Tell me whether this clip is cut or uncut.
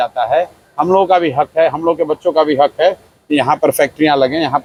uncut